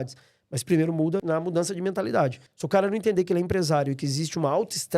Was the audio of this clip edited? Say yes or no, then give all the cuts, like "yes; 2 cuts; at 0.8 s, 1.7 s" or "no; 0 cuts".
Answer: yes; 2 cuts; at 1.2 s, 2.5 s